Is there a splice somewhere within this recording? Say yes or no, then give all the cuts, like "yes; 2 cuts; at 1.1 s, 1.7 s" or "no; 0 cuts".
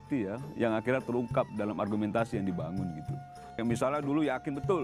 yes; 1 cut; at 3.6 s